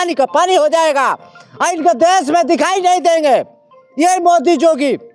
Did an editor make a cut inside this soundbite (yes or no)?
no